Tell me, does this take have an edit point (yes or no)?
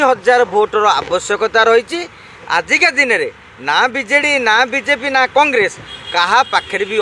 no